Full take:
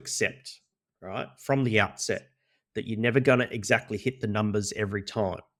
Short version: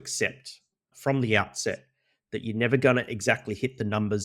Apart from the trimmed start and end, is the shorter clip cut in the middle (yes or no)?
yes